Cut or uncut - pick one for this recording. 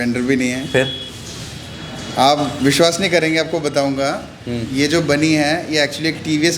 uncut